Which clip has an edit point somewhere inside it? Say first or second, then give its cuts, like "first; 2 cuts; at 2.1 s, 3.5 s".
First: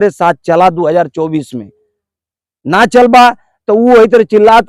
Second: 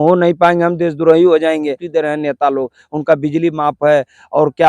second; 1 cut; at 1.8 s